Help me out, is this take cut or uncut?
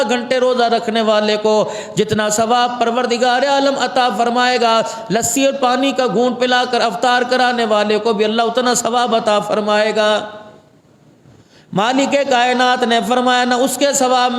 uncut